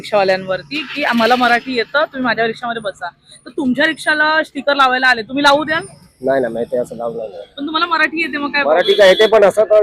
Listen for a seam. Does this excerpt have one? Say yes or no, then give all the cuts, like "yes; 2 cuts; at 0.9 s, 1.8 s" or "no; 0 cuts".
no; 0 cuts